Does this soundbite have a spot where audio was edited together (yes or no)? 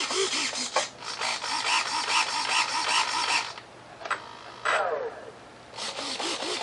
no